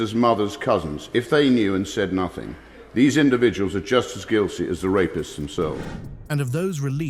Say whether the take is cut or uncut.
uncut